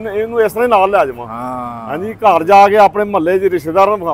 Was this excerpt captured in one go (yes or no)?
yes